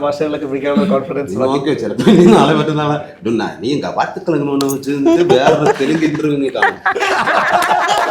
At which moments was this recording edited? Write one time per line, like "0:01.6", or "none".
none